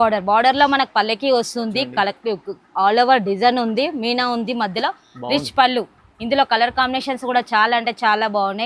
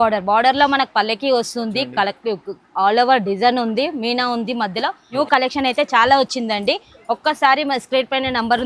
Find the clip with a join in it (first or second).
second